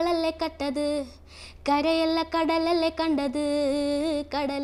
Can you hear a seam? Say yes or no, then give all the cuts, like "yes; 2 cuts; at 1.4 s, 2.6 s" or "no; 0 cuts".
no; 0 cuts